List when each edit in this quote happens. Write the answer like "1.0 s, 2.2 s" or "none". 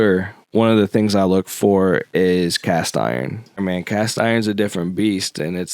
3.6 s